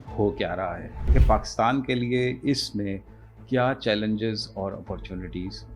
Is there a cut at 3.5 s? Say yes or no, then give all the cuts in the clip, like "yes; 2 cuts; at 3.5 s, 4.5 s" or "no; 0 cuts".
no; 1 cut; at 1.2 s